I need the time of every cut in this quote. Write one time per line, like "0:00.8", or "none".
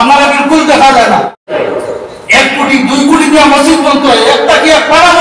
0:01.5